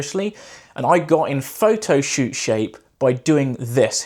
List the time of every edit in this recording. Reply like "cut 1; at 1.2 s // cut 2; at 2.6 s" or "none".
none